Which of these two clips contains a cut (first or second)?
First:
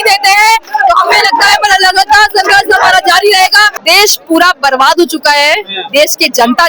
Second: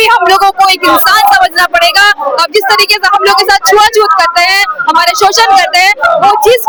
first